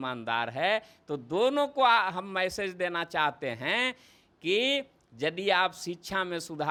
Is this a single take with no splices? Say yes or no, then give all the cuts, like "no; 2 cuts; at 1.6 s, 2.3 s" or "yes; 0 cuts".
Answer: yes; 0 cuts